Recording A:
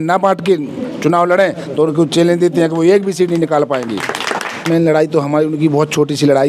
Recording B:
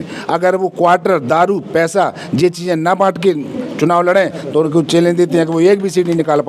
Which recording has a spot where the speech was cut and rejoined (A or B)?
A